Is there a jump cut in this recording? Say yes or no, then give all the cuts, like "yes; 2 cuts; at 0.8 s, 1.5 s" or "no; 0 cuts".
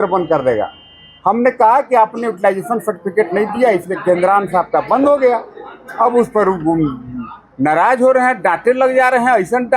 no; 0 cuts